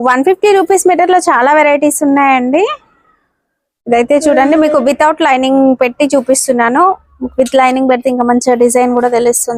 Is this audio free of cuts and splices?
yes; 0 cuts

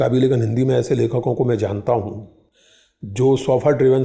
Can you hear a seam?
no; 0 cuts

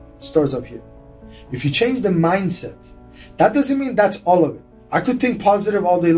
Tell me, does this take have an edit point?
no; 0 cuts

